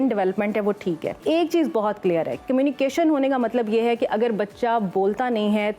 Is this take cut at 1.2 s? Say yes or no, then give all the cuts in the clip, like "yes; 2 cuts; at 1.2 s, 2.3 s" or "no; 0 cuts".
yes; 1 cut; at 1.2 s